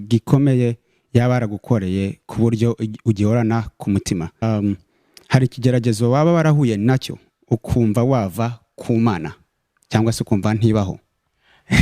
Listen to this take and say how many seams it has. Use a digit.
1